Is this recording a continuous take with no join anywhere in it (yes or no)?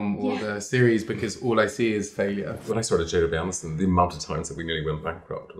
no